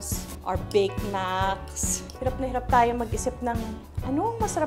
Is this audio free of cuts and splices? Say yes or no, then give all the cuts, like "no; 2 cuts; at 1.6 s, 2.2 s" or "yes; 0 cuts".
no; 1 cut; at 2.1 s